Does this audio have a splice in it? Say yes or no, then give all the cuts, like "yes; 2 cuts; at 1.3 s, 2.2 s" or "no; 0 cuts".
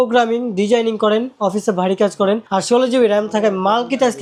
no; 0 cuts